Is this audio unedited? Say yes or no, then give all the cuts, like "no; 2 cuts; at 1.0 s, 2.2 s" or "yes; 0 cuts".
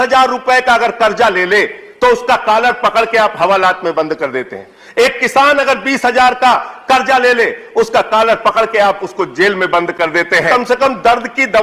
no; 1 cut; at 10.5 s